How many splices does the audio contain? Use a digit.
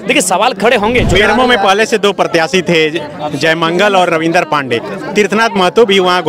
1